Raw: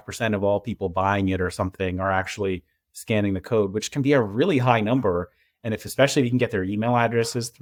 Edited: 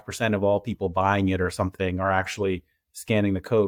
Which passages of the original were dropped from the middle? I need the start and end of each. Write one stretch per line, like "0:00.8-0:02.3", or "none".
none